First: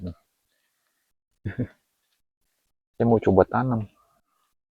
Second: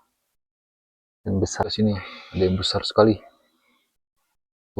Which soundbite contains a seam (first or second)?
second